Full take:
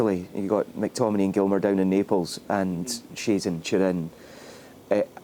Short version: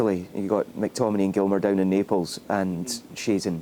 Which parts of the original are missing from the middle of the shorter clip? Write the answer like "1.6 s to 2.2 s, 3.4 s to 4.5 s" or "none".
none